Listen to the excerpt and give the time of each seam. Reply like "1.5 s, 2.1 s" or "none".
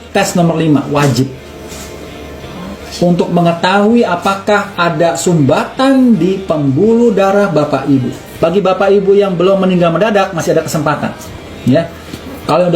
8.3 s